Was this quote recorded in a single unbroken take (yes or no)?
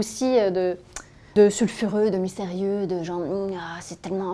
no